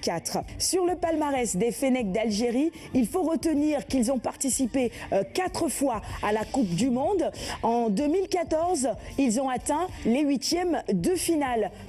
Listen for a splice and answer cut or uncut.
cut